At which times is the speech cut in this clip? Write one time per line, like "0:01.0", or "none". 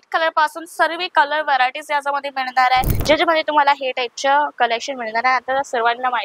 0:02.9

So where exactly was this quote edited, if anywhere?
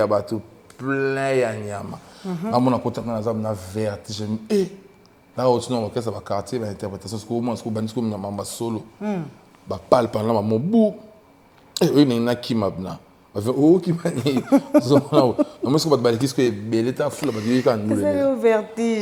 none

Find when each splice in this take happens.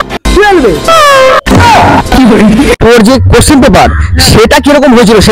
0:02.8

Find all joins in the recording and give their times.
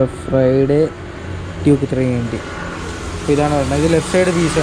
none

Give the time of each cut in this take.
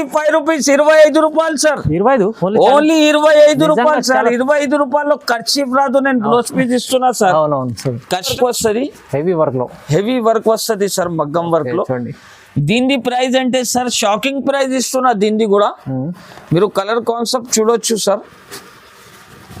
0:08.3

